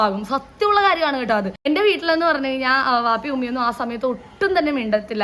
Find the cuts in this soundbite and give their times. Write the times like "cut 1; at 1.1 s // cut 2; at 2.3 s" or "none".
cut 1; at 1.6 s